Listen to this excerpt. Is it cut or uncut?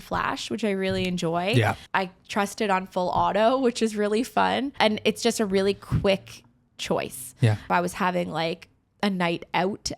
cut